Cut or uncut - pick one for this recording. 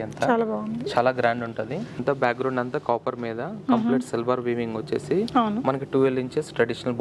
cut